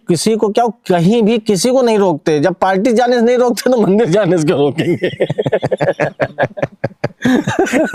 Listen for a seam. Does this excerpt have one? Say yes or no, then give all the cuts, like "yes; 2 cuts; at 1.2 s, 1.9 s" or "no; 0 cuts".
no; 0 cuts